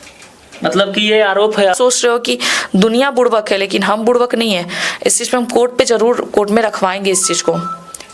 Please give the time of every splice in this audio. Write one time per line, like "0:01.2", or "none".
0:01.8